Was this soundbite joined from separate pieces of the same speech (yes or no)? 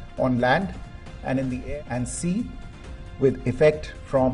yes